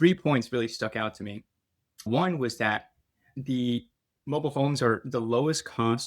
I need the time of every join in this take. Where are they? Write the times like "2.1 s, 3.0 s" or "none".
2.1 s, 3.3 s